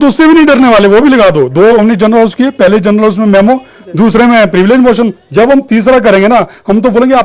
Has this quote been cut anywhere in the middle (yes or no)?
no